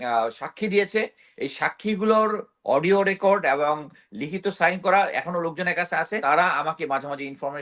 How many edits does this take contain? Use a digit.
1